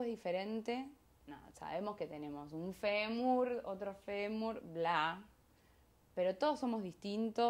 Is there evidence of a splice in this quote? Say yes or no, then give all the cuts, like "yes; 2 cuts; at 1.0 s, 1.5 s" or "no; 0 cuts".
yes; 1 cut; at 1.0 s